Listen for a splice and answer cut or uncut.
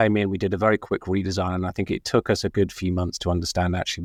uncut